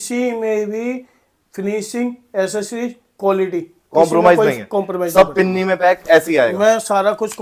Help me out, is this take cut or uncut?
uncut